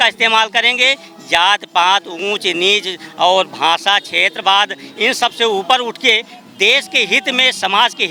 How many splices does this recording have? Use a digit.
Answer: 0